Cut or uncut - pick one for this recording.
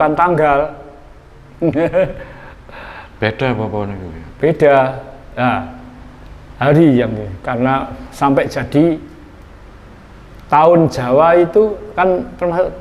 uncut